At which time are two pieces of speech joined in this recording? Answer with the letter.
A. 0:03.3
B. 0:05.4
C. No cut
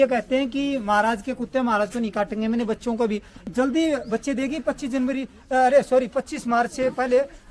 A